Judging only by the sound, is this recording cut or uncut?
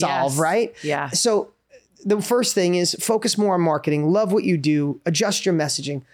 uncut